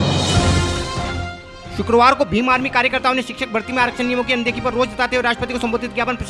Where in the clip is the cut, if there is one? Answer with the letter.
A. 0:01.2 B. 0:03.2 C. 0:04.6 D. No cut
A